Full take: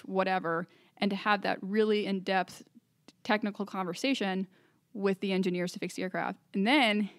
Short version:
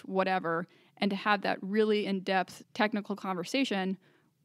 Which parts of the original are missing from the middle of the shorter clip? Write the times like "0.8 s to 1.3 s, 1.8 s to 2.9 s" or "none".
2.6 s to 3.1 s